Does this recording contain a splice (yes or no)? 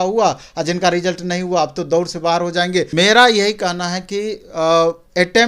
yes